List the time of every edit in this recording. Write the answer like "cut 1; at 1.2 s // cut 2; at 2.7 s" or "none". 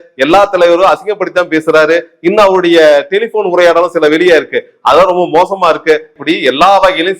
cut 1; at 6.1 s